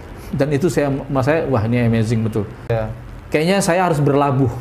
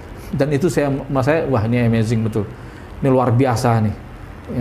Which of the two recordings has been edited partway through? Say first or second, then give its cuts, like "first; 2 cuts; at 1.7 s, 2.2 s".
first; 1 cut; at 2.7 s